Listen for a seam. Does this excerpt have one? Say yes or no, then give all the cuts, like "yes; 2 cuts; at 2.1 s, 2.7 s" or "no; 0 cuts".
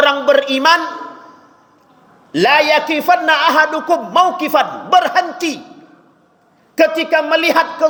no; 0 cuts